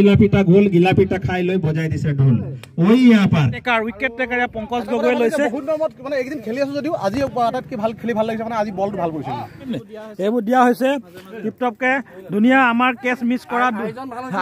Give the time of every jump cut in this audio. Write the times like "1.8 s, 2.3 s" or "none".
3.6 s, 9.7 s